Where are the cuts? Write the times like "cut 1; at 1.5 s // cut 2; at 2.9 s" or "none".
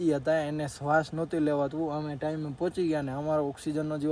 none